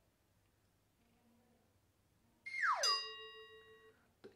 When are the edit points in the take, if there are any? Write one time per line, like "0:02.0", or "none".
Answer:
none